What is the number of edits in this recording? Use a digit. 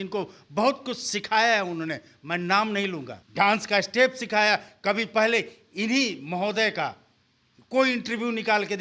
1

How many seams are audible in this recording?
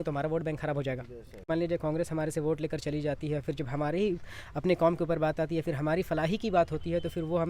1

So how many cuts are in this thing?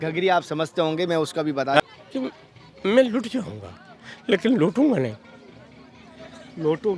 1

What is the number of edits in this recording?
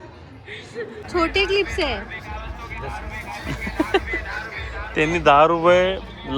1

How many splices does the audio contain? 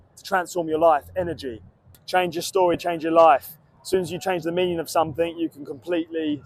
1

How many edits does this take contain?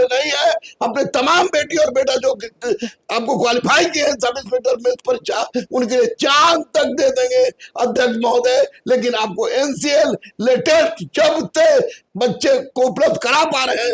0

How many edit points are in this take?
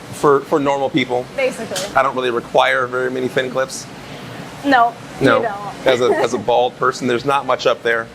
1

